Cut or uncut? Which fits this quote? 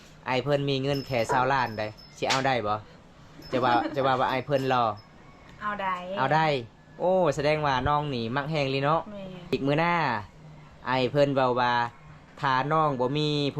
cut